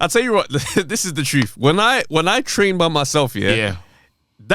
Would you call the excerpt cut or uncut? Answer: uncut